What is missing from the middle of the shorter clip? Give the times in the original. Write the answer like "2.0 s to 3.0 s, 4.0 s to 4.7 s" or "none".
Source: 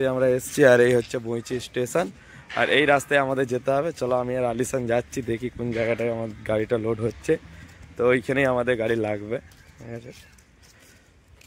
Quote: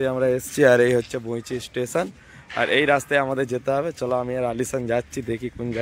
none